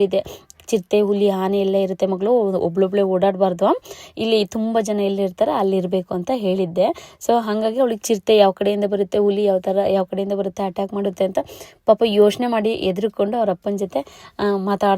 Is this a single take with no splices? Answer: yes; 0 cuts

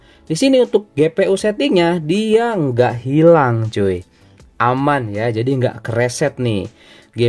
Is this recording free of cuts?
yes; 0 cuts

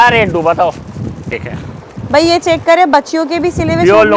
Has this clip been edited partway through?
yes; 1 cut; at 1.4 s

